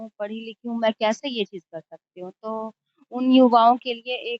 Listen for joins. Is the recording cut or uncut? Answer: uncut